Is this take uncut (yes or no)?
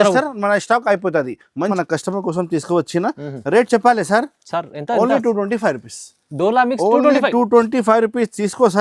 no